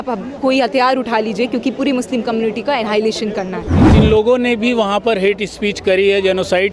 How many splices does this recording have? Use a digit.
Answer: 1